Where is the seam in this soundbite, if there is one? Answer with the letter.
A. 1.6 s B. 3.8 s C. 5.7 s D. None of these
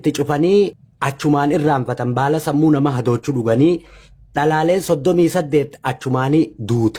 D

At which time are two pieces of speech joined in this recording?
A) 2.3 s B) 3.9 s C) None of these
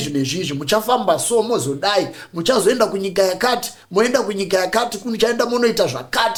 C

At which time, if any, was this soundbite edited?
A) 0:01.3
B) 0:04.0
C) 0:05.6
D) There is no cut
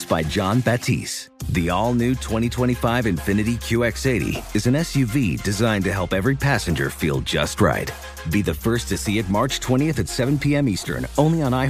D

